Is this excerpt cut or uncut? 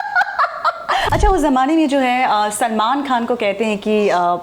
cut